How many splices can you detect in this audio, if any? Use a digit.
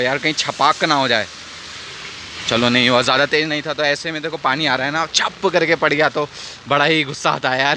0